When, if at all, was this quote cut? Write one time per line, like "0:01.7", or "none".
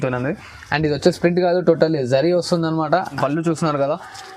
0:03.1